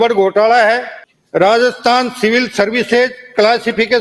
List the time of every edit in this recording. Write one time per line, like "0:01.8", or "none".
0:00.9